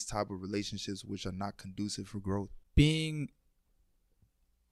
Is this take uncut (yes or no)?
yes